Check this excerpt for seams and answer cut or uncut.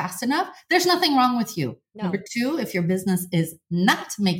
uncut